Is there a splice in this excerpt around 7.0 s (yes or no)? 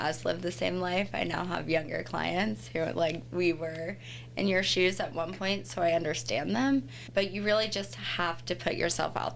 yes